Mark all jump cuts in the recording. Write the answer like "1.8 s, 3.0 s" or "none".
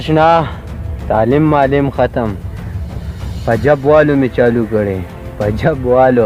none

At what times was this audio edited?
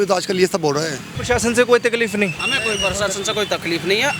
1.1 s

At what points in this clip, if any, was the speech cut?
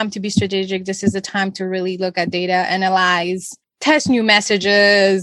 3.6 s

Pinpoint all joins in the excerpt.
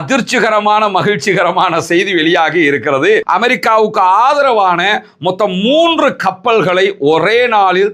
3.2 s

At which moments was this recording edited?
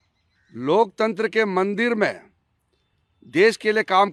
none

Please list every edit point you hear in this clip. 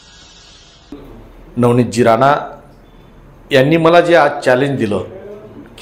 0.9 s

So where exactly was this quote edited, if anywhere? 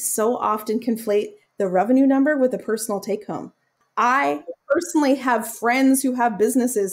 1.4 s, 3.8 s

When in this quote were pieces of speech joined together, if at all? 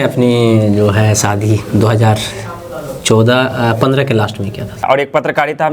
4.8 s

